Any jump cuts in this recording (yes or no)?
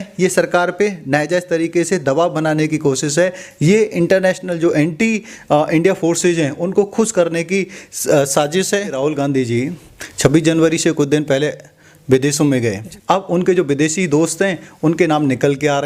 yes